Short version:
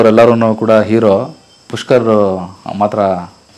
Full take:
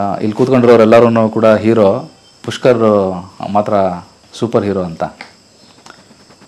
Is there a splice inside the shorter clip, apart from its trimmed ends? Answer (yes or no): no